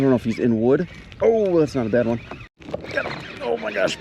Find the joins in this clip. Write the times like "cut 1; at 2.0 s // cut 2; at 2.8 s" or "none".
cut 1; at 2.5 s